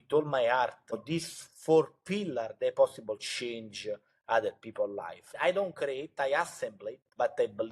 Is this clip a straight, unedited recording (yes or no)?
no